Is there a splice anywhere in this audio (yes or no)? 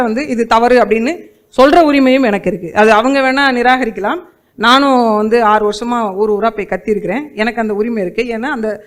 no